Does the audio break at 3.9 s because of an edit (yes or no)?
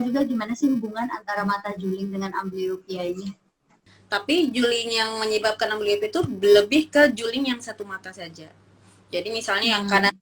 yes